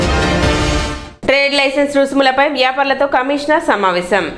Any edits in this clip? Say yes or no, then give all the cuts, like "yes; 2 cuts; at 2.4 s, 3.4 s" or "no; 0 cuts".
yes; 1 cut; at 1.0 s